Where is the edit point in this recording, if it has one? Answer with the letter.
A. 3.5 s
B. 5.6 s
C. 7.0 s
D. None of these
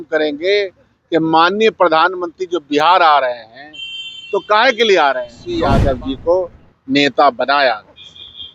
B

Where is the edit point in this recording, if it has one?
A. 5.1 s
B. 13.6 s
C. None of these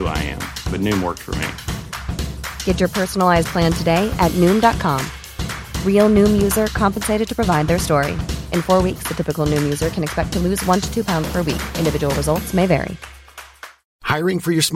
C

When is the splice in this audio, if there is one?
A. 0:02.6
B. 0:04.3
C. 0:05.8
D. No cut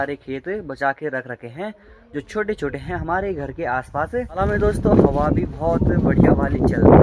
B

